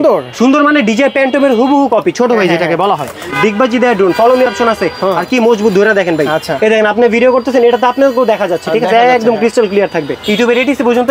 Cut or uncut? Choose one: cut